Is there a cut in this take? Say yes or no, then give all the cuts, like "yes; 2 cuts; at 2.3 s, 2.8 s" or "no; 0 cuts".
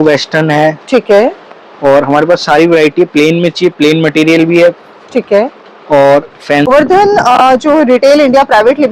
yes; 1 cut; at 6.7 s